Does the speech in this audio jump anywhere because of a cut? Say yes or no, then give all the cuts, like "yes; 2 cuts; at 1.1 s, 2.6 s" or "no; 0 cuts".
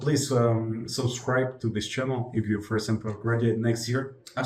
no; 0 cuts